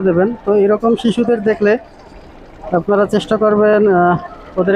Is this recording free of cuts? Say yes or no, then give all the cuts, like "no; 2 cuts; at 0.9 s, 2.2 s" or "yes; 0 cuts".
yes; 0 cuts